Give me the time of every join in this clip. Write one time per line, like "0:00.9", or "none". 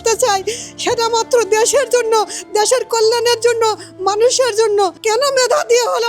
0:05.0